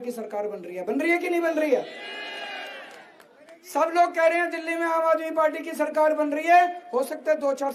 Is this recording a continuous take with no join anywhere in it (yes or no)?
yes